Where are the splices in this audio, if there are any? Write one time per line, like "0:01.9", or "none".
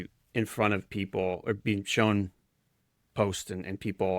none